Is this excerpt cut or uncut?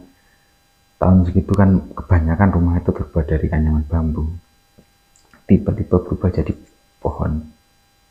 uncut